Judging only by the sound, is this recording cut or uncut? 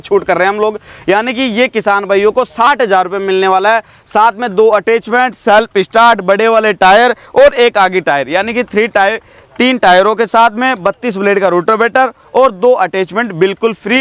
uncut